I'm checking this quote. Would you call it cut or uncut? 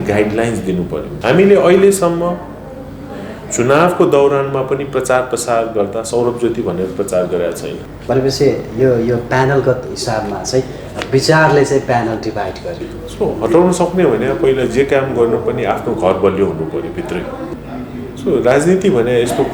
cut